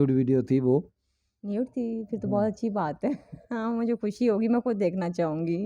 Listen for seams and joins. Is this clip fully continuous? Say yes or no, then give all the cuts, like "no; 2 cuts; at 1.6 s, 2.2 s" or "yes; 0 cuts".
yes; 0 cuts